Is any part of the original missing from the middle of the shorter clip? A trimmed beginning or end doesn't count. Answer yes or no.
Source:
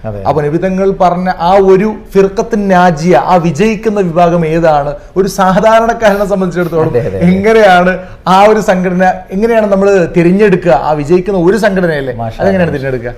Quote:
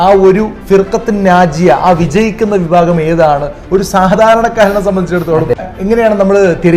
yes